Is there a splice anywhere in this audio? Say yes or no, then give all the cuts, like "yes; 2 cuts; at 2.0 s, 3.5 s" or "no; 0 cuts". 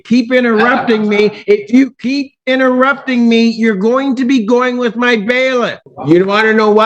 yes; 1 cut; at 5.9 s